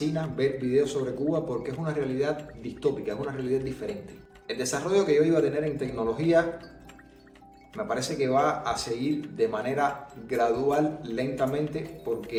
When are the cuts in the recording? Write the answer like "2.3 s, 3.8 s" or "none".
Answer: none

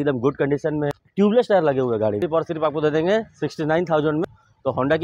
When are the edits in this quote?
1.0 s, 2.2 s, 4.3 s

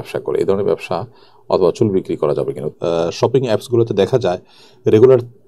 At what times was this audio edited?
2.7 s

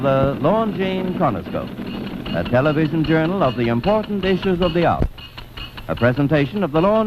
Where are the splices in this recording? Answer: 3.7 s

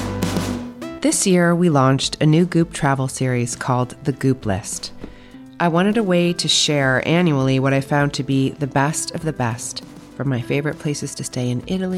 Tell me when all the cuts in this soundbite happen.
0.9 s

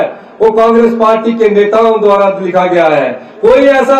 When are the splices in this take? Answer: none

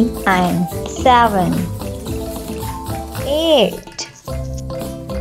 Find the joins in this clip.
1.7 s, 3.3 s, 3.7 s

